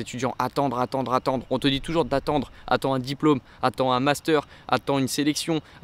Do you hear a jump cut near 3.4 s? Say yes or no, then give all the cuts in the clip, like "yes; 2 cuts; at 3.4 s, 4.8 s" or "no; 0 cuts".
no; 0 cuts